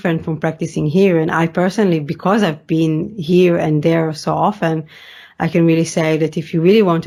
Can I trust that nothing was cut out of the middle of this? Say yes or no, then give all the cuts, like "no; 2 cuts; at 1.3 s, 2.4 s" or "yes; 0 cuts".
yes; 0 cuts